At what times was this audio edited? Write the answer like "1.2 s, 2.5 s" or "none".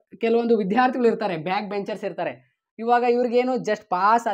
none